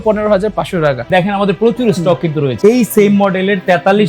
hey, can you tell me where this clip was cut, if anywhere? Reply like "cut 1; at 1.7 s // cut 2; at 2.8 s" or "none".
cut 1; at 1.1 s // cut 2; at 2.5 s